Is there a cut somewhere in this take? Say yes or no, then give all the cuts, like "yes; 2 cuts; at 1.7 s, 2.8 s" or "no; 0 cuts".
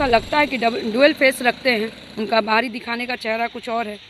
no; 0 cuts